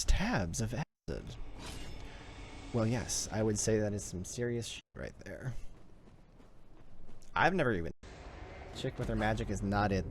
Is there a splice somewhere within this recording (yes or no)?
yes